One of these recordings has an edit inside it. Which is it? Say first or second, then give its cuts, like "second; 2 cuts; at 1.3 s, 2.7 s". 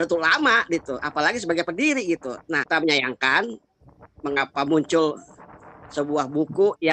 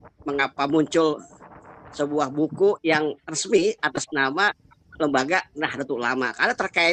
first; 1 cut; at 2.6 s